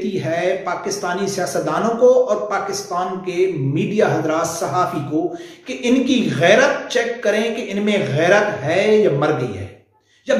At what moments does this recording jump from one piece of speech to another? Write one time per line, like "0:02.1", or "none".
none